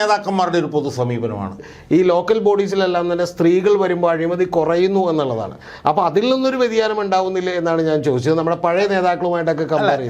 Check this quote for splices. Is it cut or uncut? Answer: cut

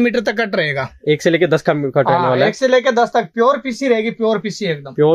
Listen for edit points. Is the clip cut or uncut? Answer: uncut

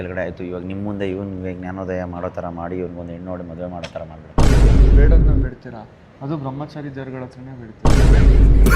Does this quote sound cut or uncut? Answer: uncut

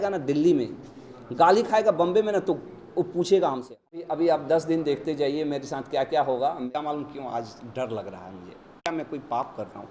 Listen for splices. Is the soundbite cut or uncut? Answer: cut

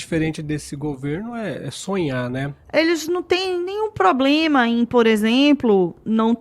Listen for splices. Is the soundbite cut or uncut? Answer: cut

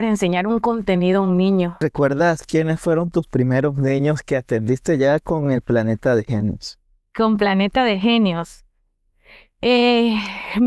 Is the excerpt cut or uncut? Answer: cut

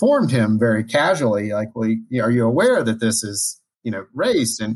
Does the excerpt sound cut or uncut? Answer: uncut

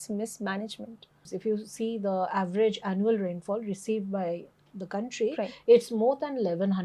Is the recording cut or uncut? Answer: cut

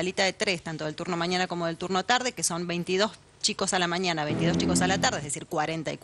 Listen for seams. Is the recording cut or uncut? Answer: uncut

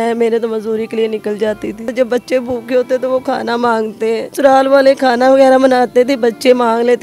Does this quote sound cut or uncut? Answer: cut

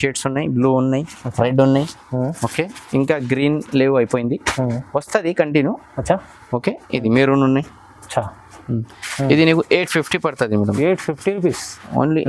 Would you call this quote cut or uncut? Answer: uncut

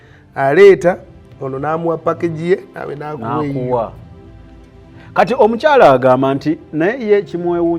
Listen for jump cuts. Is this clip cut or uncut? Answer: uncut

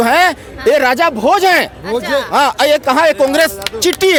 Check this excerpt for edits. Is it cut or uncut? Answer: uncut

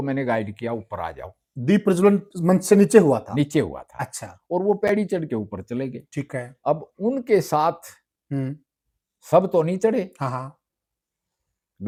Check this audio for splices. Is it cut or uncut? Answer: uncut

